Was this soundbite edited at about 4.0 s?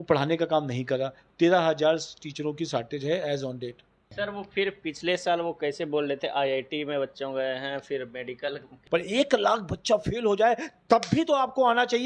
yes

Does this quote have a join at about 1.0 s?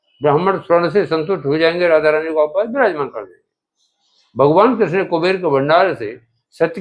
no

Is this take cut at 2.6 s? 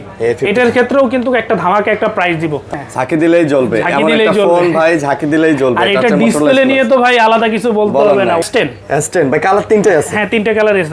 yes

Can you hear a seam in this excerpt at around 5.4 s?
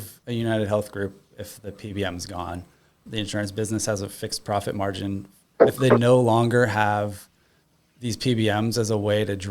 yes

